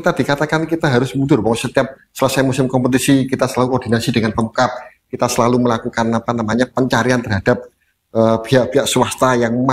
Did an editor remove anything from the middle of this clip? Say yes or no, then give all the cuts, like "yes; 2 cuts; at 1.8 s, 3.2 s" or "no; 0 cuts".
no; 0 cuts